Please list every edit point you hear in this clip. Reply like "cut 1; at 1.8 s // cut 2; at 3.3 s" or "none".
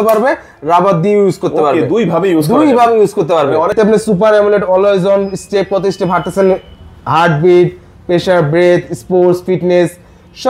cut 1; at 3.7 s

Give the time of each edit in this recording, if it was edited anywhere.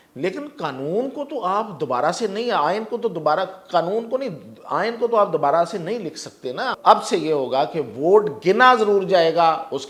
cut 1; at 6.7 s

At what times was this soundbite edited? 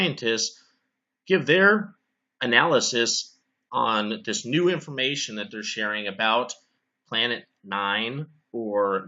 cut 1; at 1.3 s

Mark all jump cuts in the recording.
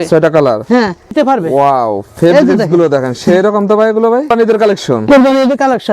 cut 1; at 1.1 s // cut 2; at 4.3 s

